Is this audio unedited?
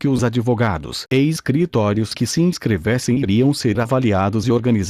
yes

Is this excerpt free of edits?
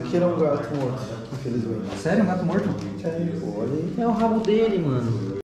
yes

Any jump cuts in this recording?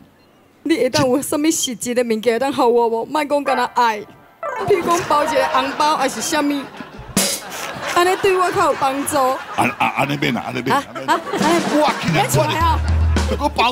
no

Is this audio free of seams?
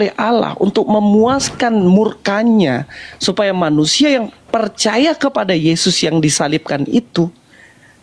yes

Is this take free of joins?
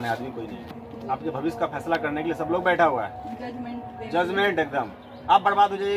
yes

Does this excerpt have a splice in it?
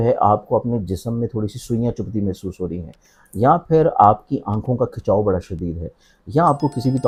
no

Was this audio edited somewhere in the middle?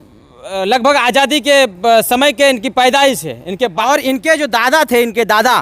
yes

